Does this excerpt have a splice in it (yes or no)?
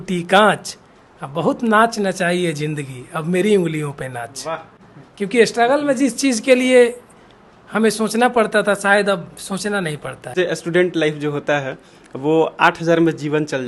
no